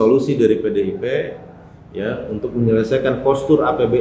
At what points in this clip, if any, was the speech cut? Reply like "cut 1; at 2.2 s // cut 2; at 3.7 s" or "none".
none